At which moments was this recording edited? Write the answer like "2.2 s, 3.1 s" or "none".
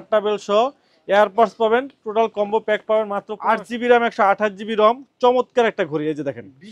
3.3 s